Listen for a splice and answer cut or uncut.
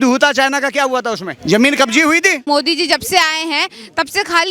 cut